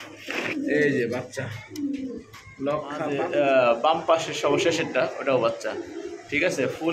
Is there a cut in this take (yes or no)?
yes